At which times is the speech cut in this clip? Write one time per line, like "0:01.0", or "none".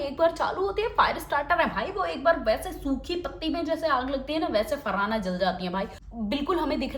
0:05.9